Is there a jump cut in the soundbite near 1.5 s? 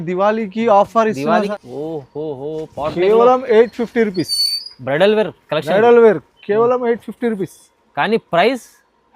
yes; 1 cut; at 1.5 s

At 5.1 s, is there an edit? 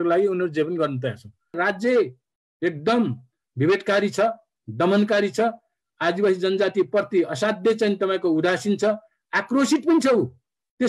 no; 1 cut; at 1.6 s

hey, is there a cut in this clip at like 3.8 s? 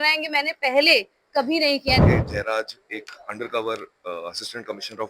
no; 1 cut; at 2.0 s

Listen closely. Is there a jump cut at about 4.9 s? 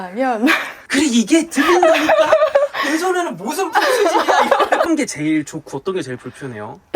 yes; 1 cut; at 4.9 s

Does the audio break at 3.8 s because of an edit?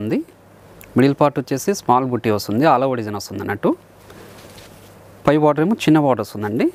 no; 0 cuts

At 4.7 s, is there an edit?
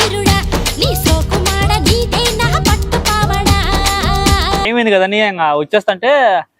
yes; 1 cut; at 4.7 s

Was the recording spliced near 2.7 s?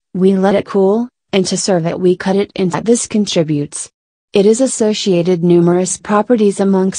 no; 0 cuts

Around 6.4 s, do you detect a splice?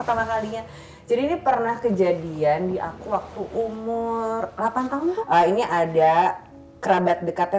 no; 1 cut; at 5.2 s

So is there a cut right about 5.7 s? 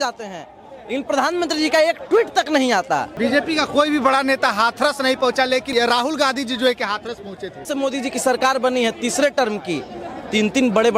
yes; 3 cuts; at 3.1 s, 5.7 s, 7.7 s

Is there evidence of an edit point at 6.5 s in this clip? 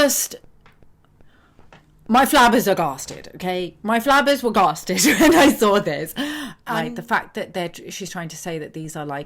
yes; 1 cut; at 6.5 s

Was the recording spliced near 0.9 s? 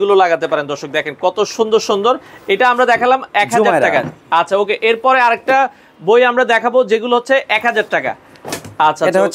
no; 0 cuts

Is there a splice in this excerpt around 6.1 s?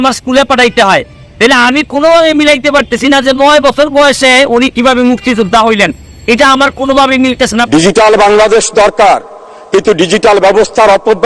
no; 1 cut; at 7.6 s

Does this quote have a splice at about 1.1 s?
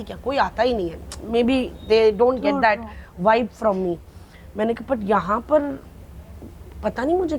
no; 0 cuts

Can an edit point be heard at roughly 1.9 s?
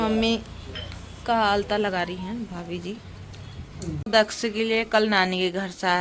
no; 1 cut; at 4.0 s

